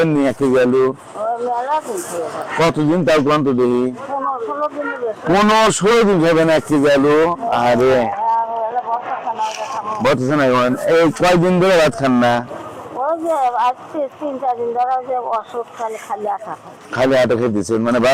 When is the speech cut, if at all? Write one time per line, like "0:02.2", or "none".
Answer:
none